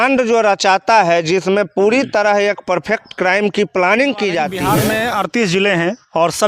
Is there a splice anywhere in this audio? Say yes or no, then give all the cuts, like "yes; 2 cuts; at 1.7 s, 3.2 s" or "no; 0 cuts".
yes; 1 cut; at 4.7 s